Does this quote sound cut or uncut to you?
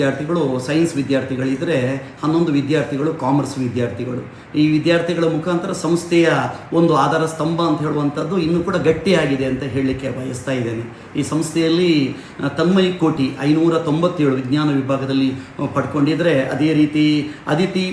uncut